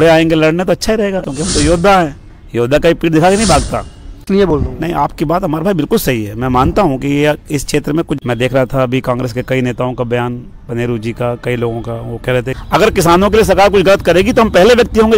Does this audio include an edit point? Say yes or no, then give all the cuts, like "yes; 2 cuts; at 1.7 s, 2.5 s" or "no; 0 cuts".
yes; 4 cuts; at 1.3 s, 4.5 s, 8.2 s, 12.6 s